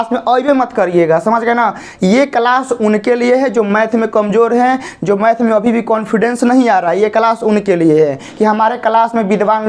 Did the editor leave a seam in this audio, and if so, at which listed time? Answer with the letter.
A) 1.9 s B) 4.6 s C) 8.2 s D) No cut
C